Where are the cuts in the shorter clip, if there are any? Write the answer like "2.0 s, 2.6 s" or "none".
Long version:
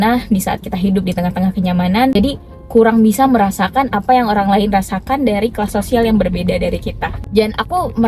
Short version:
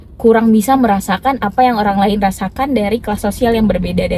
none